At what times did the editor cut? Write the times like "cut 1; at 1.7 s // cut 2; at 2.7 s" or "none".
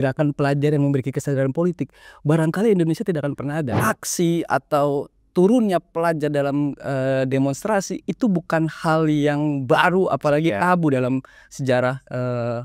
cut 1; at 3.7 s